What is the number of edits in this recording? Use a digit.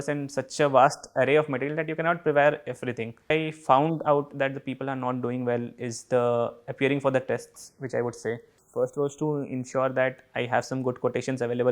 2